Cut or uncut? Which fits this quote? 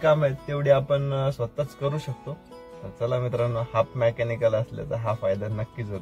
uncut